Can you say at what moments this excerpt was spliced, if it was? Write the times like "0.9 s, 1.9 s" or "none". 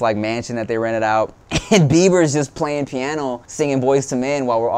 1.5 s, 3.4 s